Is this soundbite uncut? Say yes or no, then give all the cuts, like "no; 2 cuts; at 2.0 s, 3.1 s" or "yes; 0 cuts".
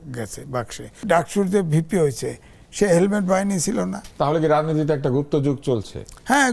no; 2 cuts; at 1.0 s, 4.1 s